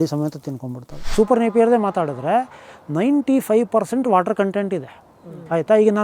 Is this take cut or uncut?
cut